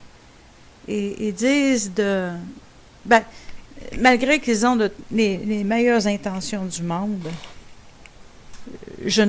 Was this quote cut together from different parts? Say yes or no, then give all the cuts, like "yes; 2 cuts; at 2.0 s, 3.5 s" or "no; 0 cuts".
no; 0 cuts